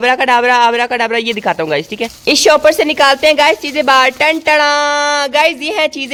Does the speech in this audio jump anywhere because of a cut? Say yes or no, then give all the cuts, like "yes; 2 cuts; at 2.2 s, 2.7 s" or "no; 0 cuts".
no; 0 cuts